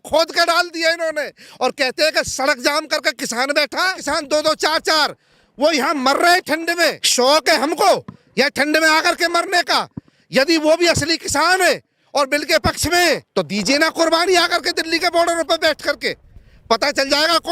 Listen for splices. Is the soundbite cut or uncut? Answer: cut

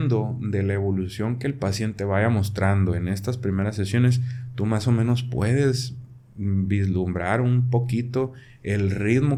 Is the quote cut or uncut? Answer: uncut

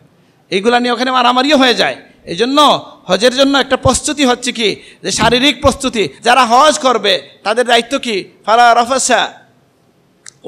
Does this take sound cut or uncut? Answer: cut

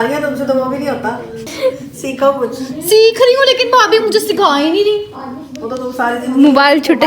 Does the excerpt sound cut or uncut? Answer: cut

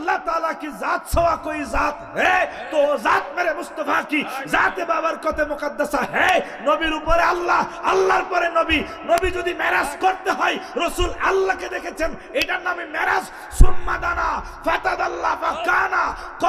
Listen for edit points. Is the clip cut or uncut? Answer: uncut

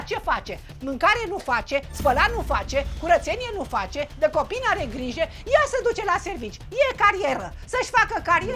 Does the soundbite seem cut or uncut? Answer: uncut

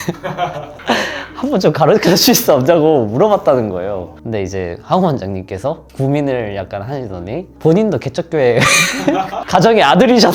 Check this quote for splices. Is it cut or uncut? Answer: cut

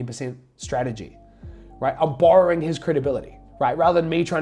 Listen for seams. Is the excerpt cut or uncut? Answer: uncut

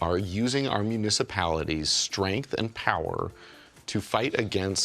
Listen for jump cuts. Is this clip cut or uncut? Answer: uncut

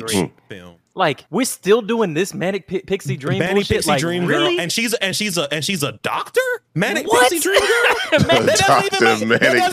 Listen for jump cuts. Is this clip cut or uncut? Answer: cut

